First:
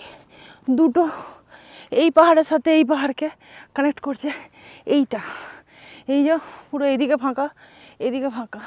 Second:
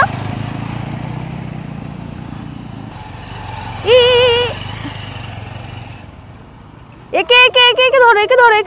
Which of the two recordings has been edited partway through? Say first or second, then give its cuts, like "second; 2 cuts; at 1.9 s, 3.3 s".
second; 1 cut; at 2.9 s